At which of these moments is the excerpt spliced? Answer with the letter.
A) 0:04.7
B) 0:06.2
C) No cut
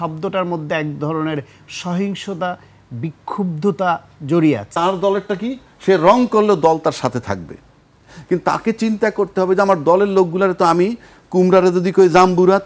A